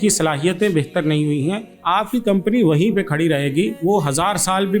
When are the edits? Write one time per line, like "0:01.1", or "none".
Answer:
0:01.7
0:03.8